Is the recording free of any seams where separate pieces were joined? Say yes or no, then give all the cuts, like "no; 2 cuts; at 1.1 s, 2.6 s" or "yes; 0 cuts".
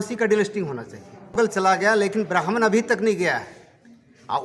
no; 1 cut; at 1.4 s